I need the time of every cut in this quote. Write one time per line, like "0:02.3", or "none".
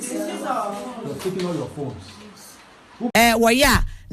0:03.1